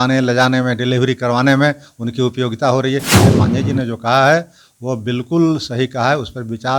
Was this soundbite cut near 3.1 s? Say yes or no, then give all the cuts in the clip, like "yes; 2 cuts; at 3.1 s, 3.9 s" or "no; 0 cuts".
yes; 1 cut; at 3.1 s